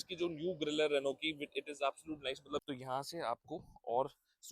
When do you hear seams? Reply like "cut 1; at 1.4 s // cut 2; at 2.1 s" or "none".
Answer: cut 1; at 2.6 s